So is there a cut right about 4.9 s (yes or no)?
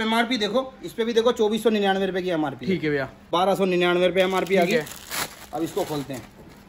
no